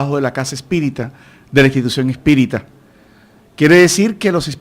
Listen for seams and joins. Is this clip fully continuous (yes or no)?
no